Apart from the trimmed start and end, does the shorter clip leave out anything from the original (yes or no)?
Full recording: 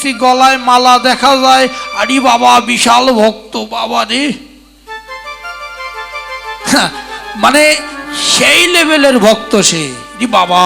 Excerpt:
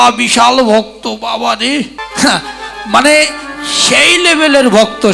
yes